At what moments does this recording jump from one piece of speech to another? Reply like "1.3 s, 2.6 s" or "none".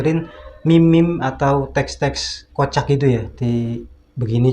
3.3 s

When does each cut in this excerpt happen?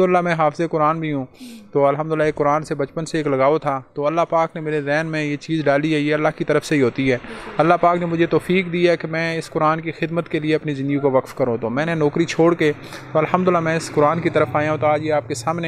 none

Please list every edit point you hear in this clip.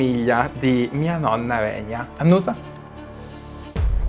2.0 s

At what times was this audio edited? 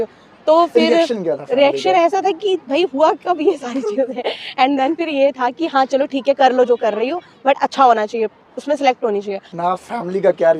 9.5 s

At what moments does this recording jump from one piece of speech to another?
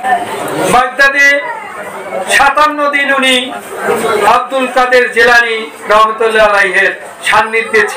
3.8 s

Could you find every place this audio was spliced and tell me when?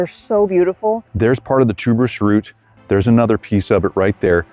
1.0 s

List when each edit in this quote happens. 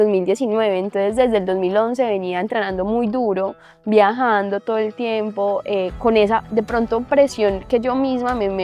none

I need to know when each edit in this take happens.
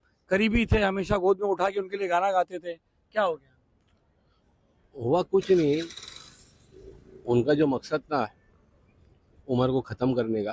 none

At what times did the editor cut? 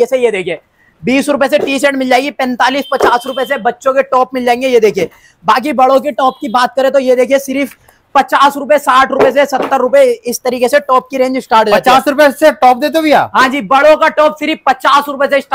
none

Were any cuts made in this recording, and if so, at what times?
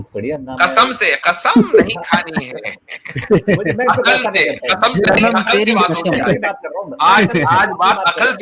none

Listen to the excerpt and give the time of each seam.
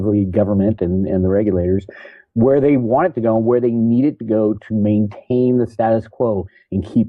none

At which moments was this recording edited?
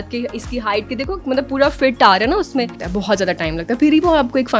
2.8 s

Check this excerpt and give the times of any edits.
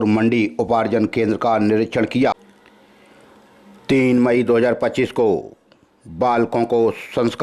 2.3 s

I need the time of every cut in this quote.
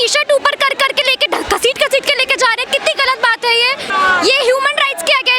3.9 s

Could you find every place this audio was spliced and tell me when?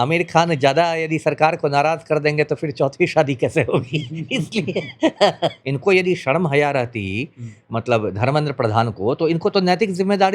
5.7 s

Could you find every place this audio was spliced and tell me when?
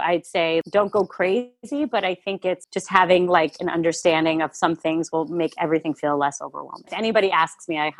6.9 s

